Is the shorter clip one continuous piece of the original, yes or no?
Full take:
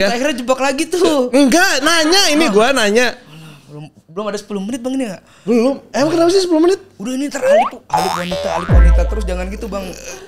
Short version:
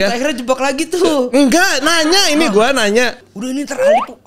no